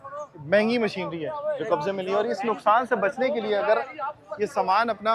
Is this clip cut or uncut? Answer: uncut